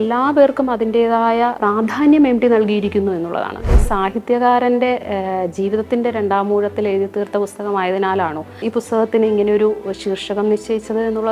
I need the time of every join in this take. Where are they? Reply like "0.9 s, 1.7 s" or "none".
1.6 s, 3.7 s, 8.5 s